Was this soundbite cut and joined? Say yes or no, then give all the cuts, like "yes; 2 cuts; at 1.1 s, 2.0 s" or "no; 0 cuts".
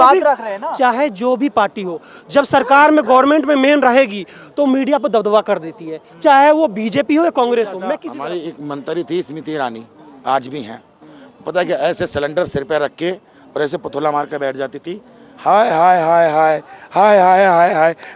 yes; 1 cut; at 8.0 s